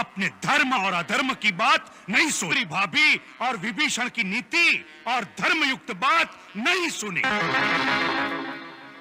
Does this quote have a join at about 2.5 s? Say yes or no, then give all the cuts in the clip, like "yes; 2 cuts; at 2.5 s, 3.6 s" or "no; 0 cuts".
yes; 1 cut; at 2.5 s